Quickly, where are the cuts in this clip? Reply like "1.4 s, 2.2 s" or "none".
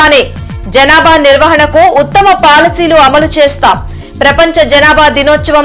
none

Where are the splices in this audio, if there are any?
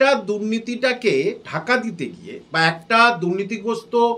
1.5 s

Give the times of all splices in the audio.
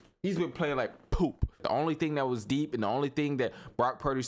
1.6 s

